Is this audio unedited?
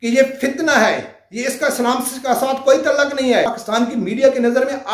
no; 1 cut; at 3.6 s

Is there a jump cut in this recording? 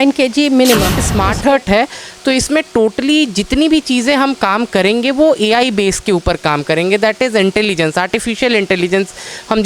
yes; 1 cut; at 1.0 s

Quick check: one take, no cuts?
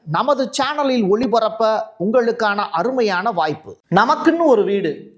no; 1 cut; at 3.7 s

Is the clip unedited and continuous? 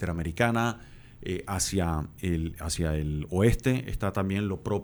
yes; 0 cuts

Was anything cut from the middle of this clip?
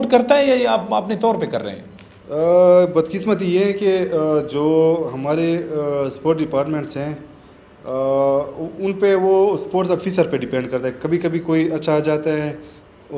no; 0 cuts

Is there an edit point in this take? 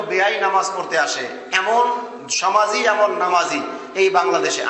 no; 0 cuts

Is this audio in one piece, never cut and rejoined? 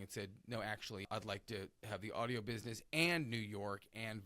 no; 1 cut; at 1.1 s

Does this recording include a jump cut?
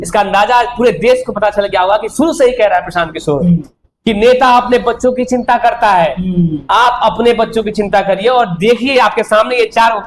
no; 0 cuts

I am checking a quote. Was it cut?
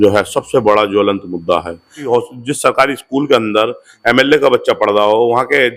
yes; 1 cut; at 2.0 s

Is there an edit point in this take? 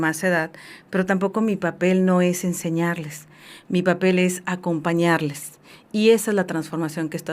no; 0 cuts

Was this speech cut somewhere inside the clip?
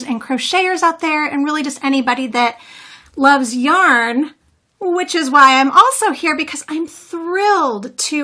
no; 0 cuts

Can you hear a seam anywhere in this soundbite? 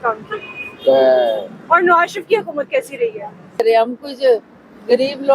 yes; 1 cut; at 3.6 s

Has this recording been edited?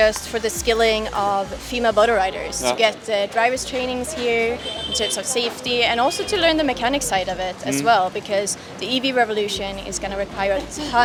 no; 0 cuts

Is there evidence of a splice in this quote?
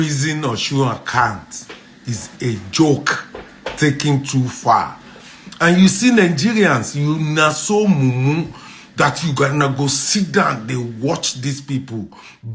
no; 0 cuts

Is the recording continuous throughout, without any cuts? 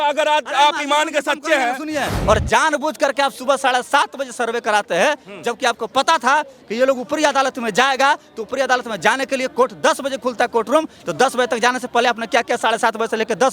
no; 1 cut; at 2.1 s

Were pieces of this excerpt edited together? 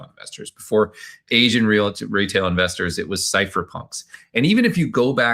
no; 0 cuts

